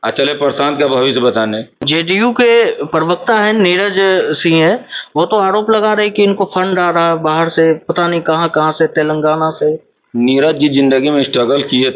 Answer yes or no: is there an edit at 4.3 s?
no